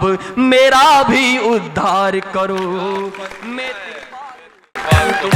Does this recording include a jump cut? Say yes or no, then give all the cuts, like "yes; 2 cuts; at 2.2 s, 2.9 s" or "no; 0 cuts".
no; 0 cuts